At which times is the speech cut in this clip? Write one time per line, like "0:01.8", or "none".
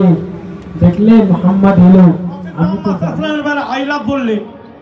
0:02.9